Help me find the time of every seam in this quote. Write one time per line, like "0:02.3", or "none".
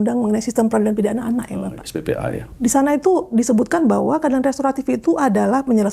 0:02.5